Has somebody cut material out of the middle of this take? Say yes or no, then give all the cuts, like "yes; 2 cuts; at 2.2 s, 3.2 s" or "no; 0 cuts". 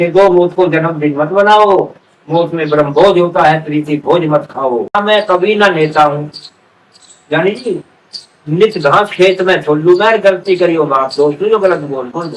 yes; 1 cut; at 5.0 s